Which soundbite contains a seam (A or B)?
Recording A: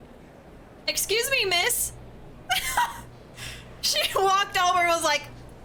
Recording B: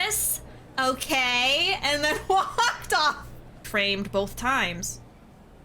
B